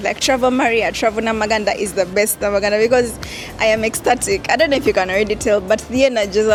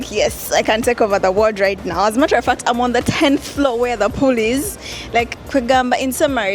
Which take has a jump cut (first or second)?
second